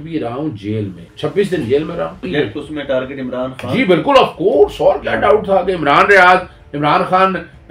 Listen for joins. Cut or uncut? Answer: cut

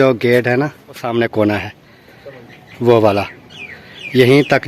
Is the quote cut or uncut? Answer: cut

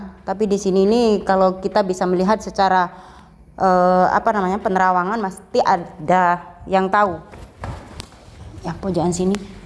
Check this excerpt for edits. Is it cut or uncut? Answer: cut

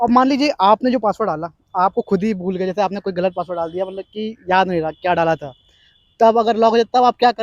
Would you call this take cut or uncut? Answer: uncut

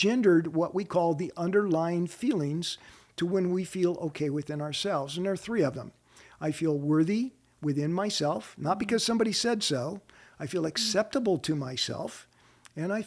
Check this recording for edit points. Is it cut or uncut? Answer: uncut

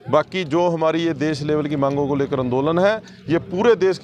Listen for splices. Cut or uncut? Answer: uncut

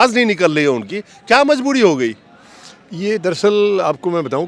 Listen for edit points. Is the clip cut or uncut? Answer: uncut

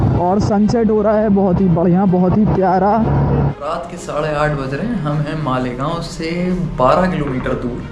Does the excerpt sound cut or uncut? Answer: cut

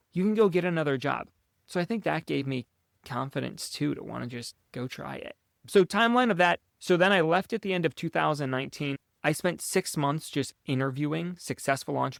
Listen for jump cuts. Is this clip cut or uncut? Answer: uncut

